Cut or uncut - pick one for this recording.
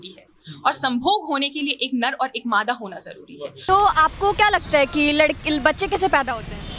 cut